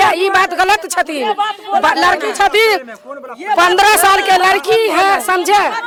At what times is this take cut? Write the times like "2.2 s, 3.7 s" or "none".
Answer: none